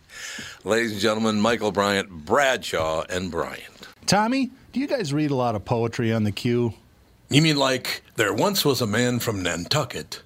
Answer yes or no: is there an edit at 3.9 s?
yes